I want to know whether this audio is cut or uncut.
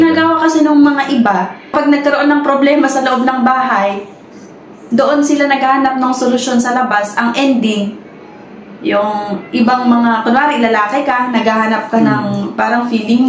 uncut